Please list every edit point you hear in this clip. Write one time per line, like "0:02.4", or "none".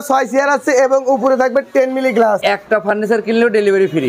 0:02.4